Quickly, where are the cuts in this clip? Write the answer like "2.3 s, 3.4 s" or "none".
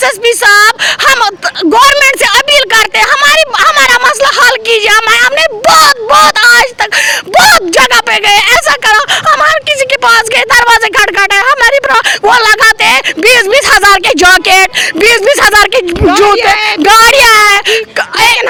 none